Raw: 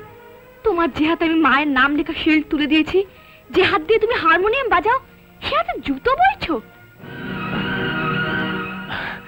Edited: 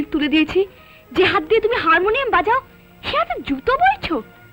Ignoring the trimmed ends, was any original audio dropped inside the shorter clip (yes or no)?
no